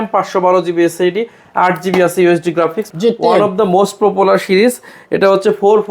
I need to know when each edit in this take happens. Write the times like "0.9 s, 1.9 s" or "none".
2.9 s

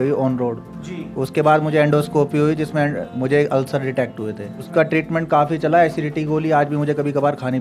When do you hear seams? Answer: 4.6 s

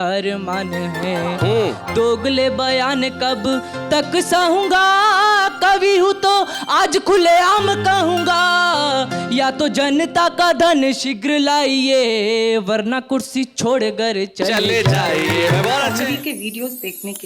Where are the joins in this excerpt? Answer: 15.9 s

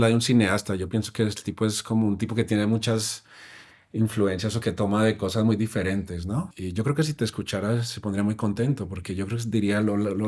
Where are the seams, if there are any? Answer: 6.5 s

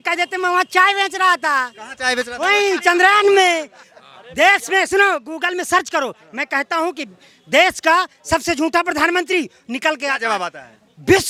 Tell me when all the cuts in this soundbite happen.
none

